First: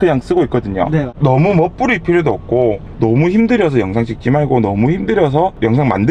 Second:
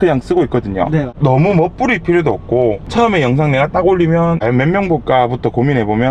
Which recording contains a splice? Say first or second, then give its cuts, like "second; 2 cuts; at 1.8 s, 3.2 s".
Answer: first; 1 cut; at 2.8 s